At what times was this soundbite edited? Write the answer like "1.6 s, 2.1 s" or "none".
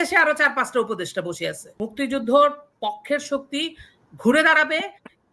1.7 s